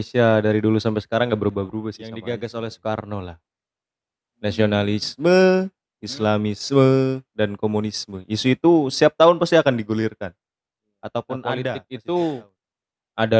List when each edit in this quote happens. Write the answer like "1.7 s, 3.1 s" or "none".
2.1 s, 11.8 s